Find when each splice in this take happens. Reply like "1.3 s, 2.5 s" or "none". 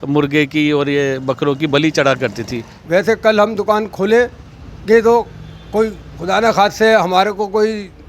2.7 s